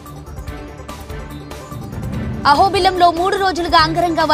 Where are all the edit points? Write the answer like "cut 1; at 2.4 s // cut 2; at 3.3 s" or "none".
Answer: none